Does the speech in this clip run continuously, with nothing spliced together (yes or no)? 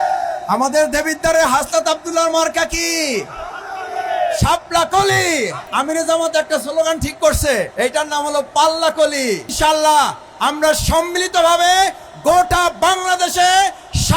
no